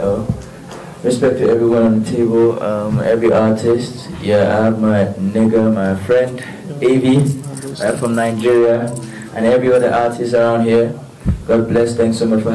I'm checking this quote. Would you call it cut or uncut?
uncut